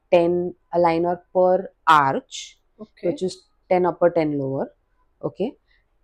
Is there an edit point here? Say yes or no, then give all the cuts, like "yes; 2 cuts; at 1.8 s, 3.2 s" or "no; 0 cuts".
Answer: no; 0 cuts